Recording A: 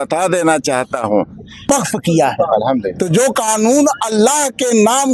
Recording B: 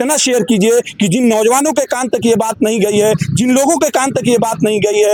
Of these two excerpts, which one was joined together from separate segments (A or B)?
A